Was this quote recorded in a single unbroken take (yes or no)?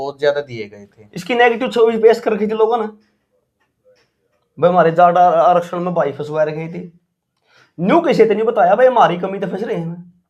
yes